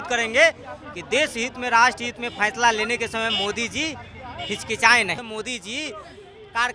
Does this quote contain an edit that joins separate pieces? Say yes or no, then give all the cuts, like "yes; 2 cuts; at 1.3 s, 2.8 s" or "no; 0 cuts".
yes; 1 cut; at 5.2 s